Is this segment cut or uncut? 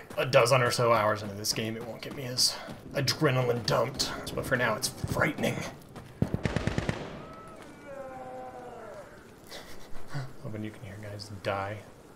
cut